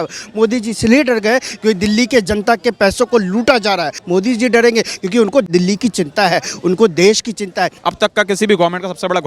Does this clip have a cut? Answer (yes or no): yes